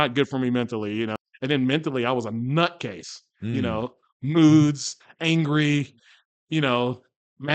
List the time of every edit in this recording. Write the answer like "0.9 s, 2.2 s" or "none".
1.2 s